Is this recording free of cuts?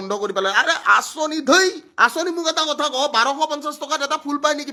yes; 0 cuts

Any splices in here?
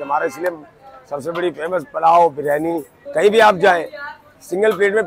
yes; 1 cut; at 2.9 s

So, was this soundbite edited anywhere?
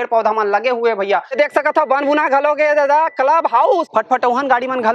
yes; 2 cuts; at 1.3 s, 3.8 s

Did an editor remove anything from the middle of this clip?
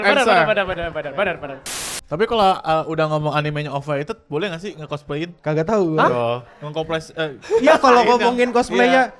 yes; 2 cuts; at 1.6 s, 5.4 s

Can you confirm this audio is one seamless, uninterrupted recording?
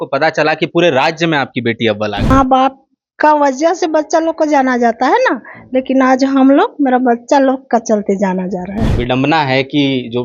no; 2 cuts; at 2.3 s, 8.9 s

